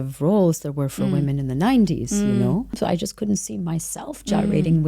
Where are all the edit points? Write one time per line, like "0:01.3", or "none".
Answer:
0:02.8